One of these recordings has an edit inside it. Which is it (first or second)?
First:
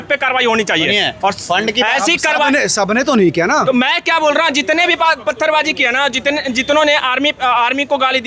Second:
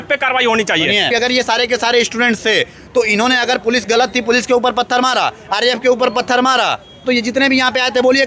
second